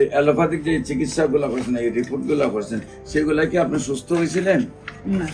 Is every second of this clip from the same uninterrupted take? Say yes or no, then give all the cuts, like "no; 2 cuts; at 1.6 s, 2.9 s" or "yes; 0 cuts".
yes; 0 cuts